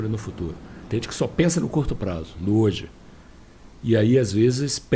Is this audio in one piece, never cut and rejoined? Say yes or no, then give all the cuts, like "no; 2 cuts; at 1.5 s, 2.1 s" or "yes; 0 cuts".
yes; 0 cuts